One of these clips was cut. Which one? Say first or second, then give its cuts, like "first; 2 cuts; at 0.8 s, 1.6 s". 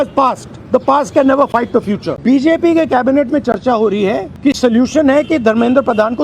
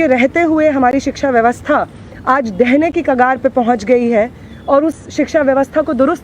first; 2 cuts; at 2.1 s, 4.3 s